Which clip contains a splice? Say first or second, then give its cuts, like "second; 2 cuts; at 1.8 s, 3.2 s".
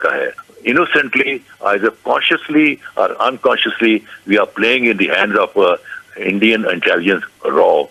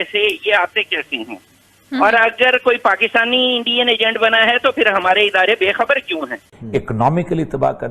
second; 1 cut; at 6.4 s